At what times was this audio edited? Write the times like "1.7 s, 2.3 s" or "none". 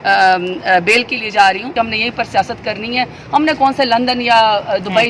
1.7 s